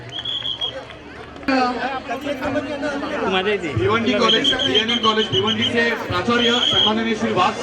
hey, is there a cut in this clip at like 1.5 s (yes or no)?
yes